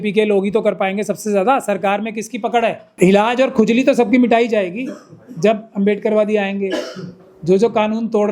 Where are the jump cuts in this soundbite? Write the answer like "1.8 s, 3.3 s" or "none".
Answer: 2.8 s

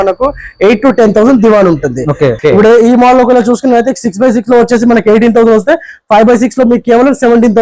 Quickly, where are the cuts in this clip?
2.4 s

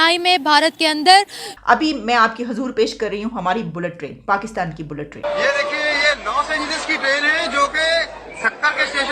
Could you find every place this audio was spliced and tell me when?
1.4 s, 5.2 s

